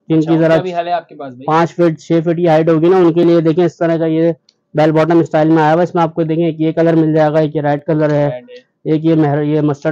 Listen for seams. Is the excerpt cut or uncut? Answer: uncut